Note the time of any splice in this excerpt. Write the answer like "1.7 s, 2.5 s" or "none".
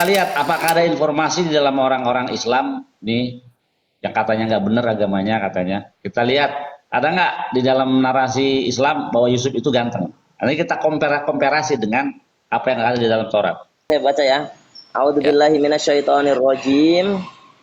13.9 s